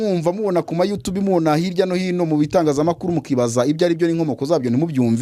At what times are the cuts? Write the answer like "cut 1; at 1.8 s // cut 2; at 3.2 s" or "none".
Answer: none